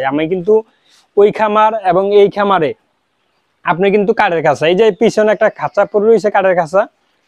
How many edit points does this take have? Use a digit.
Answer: 0